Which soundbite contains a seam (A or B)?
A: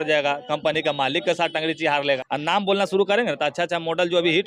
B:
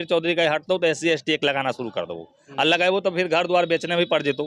A